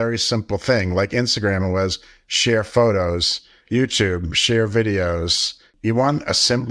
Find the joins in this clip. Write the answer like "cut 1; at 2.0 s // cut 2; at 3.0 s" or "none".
cut 1; at 5.7 s